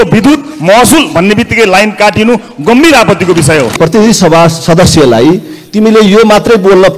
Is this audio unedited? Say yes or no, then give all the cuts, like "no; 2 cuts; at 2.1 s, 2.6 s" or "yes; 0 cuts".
no; 1 cut; at 3.8 s